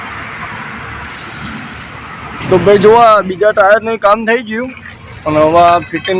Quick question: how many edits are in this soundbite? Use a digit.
1